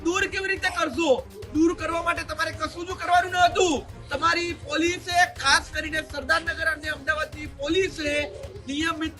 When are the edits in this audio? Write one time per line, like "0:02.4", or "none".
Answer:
none